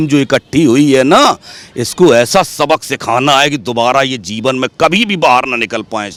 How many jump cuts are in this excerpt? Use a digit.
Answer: 0